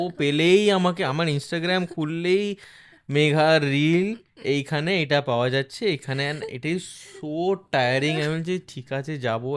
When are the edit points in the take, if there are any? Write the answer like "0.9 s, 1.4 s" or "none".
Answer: none